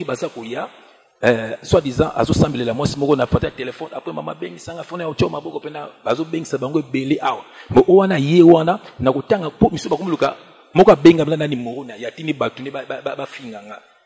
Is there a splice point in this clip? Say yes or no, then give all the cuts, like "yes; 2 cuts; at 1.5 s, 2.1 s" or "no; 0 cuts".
no; 0 cuts